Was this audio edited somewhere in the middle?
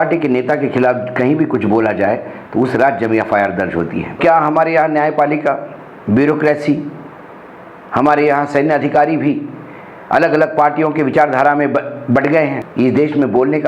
yes; 2 cuts; at 4.2 s, 12.6 s

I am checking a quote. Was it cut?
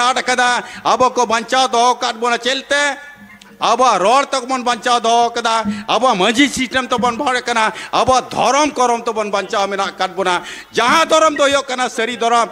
no; 0 cuts

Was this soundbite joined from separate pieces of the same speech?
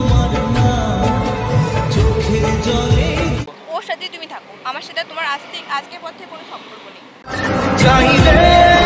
yes; 1 cut; at 3.4 s

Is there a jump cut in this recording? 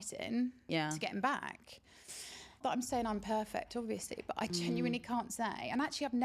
yes; 1 cut; at 2.6 s

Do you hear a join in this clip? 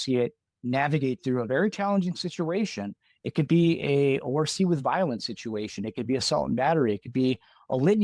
no; 0 cuts

